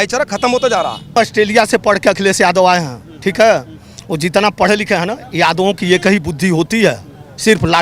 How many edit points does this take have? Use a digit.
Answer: 1